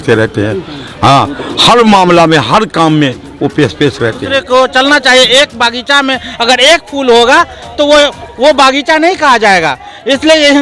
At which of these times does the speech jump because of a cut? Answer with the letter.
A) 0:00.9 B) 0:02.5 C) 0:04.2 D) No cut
C